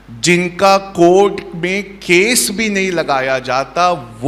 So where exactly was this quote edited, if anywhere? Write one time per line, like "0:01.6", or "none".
none